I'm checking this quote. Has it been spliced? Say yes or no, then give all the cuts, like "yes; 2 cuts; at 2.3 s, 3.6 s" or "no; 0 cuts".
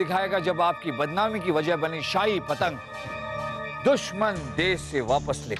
no; 0 cuts